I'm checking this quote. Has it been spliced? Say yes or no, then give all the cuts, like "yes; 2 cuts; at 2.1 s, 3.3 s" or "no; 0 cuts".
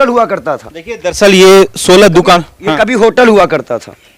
no; 0 cuts